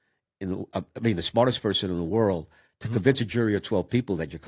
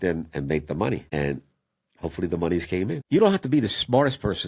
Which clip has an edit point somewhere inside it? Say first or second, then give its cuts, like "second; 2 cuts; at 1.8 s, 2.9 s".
second; 2 cuts; at 1.1 s, 3.0 s